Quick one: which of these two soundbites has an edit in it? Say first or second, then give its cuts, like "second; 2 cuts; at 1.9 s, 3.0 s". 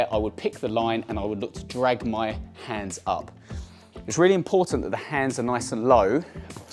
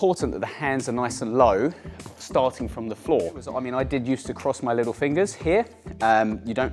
second; 1 cut; at 3.6 s